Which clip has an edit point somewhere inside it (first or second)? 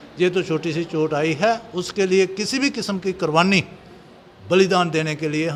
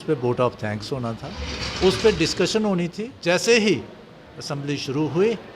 second